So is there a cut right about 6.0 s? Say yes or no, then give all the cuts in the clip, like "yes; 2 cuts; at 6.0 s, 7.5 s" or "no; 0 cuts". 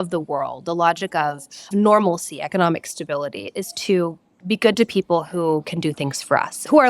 no; 2 cuts; at 1.6 s, 3.5 s